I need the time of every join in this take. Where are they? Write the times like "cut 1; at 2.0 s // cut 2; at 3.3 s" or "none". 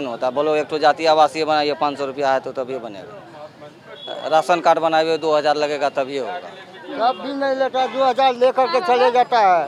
none